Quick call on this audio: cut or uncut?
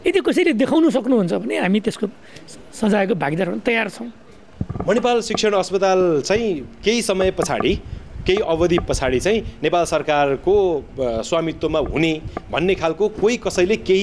uncut